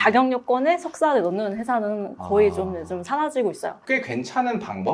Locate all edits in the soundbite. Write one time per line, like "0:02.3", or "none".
0:03.8